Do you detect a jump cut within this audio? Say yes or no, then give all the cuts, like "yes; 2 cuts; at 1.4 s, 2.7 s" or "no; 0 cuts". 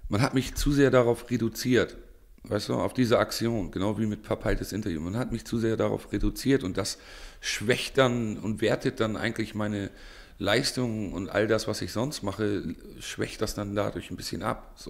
no; 0 cuts